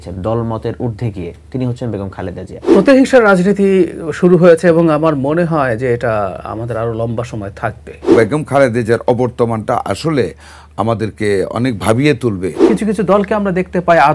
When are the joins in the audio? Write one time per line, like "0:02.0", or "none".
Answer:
0:02.7
0:08.1
0:12.7